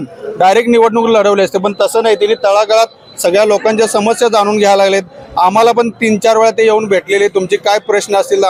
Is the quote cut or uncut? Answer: uncut